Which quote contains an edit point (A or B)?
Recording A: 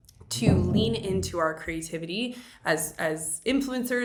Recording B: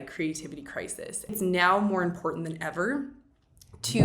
B